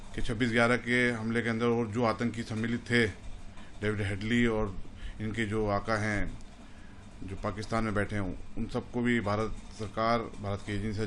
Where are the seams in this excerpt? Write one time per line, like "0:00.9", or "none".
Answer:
none